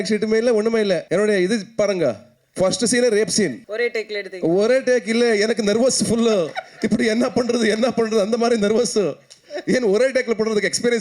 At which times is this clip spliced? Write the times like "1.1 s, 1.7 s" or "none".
1.0 s, 3.6 s